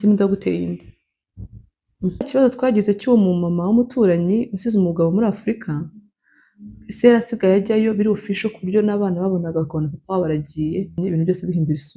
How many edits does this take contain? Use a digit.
2